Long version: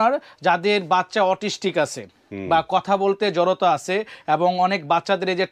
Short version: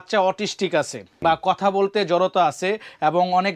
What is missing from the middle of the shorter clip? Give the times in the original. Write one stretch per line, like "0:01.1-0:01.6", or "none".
0:02.1-0:02.3

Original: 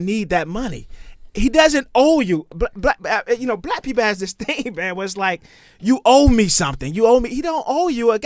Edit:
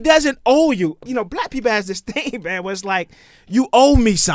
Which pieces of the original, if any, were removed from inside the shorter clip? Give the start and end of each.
0:02.6-0:03.4

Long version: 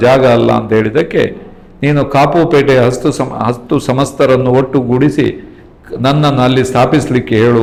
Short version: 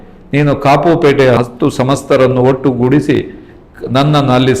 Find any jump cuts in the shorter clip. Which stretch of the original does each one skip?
0:02.9-0:03.5

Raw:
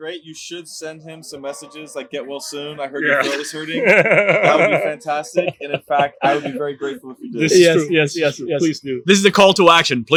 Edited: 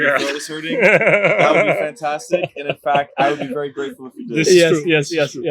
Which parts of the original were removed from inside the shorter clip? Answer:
none

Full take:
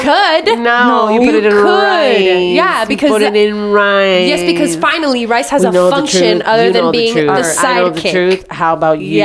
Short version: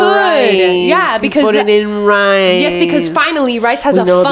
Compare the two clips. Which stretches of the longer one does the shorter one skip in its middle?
none

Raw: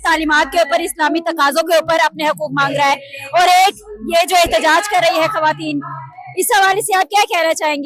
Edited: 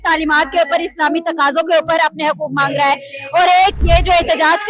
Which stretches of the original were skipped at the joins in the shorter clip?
0:03.8-0:04.0

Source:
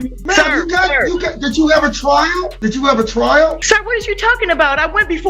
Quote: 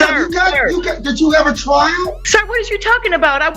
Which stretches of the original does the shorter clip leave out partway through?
0:02.6-0:03.6

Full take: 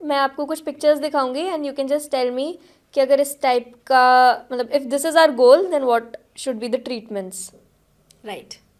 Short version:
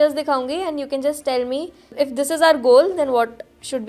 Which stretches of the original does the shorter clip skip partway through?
0:02.7-0:04.5

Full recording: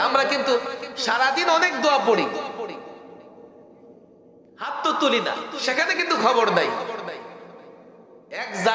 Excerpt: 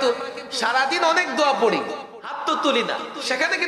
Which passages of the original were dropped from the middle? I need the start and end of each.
0:02.6-0:04.5

